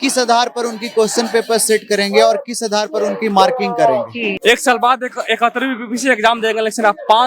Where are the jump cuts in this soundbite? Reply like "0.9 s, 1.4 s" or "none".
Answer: 4.3 s